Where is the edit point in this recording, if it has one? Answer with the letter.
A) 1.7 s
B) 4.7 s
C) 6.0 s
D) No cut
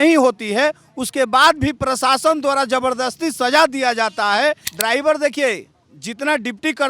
B